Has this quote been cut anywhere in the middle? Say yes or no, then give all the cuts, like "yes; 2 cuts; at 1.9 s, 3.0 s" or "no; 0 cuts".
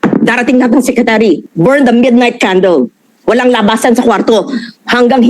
yes; 1 cut; at 1.5 s